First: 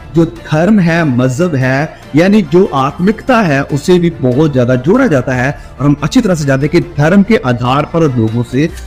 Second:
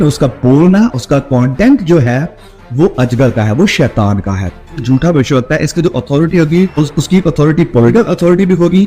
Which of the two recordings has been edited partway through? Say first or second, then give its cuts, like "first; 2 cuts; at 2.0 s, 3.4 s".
second; 3 cuts; at 4.8 s, 6.7 s, 7.9 s